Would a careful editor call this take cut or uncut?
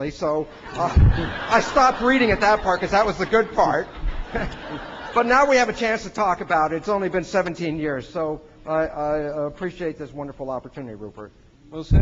cut